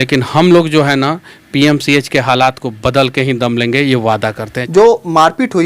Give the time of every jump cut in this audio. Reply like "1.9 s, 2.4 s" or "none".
4.5 s